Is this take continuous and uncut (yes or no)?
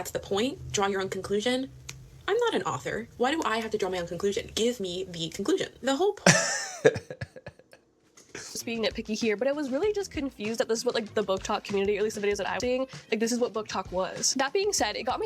no